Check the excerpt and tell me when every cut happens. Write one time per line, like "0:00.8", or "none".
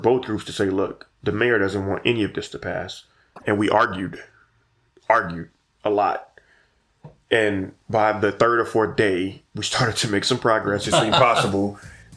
0:03.4